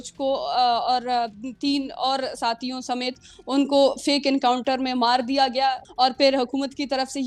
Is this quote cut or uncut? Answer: cut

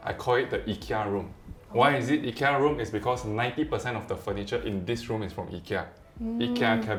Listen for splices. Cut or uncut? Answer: uncut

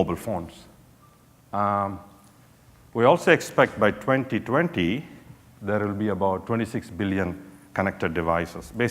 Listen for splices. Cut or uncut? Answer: cut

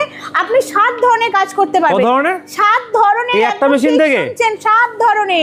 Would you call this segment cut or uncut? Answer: uncut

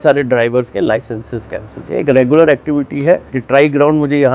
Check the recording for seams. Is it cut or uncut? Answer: cut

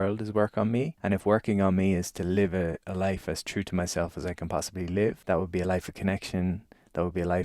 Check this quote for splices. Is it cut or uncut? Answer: cut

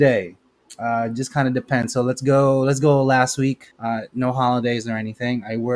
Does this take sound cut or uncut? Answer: cut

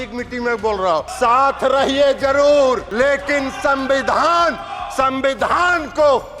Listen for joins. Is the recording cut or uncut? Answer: cut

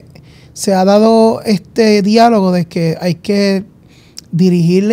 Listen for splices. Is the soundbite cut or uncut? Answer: uncut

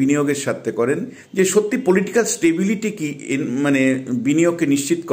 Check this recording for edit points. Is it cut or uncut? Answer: cut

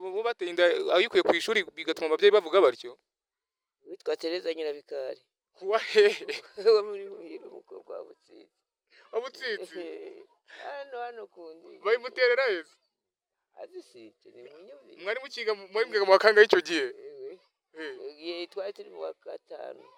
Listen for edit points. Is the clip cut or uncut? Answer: uncut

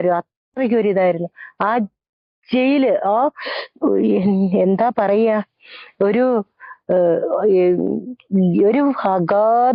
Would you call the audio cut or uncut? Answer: uncut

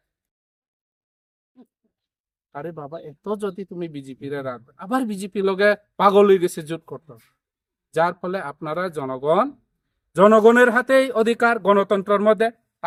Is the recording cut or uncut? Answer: uncut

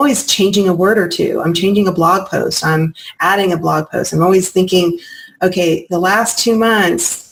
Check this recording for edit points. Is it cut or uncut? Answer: uncut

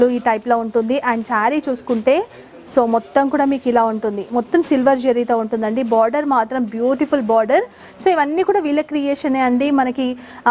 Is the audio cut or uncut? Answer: uncut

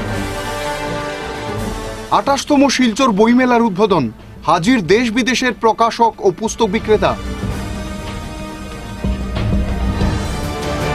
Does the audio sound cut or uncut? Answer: cut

